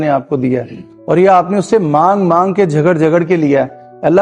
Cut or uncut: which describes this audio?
uncut